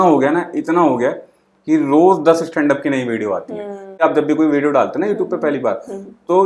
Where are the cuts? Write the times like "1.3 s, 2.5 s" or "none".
4.0 s